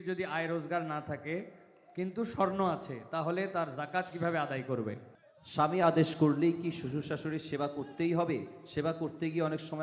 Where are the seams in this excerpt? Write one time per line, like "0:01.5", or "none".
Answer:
0:05.0